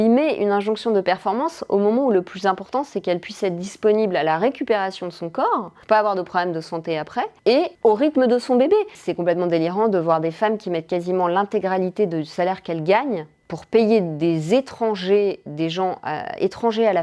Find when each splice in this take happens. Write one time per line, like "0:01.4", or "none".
none